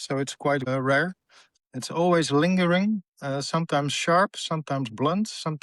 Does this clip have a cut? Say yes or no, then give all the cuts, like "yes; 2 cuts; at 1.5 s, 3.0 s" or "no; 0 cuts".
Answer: yes; 1 cut; at 1.5 s